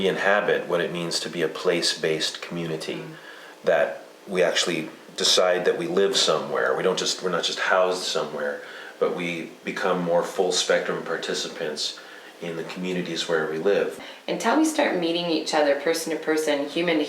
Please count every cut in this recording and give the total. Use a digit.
1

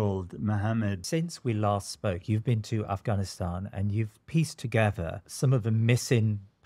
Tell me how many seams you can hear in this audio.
2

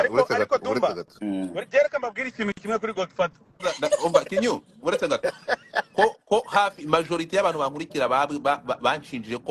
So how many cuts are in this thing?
1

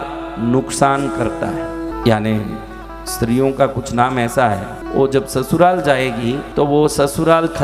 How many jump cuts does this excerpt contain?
3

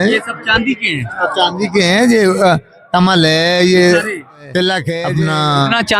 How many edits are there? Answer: 1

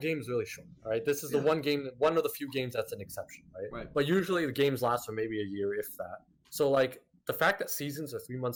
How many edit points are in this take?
0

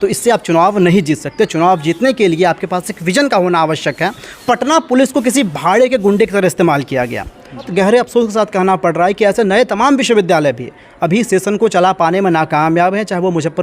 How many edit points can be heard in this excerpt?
2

